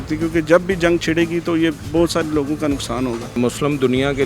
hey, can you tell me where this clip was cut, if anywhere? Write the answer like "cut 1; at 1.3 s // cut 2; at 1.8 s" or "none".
cut 1; at 3.3 s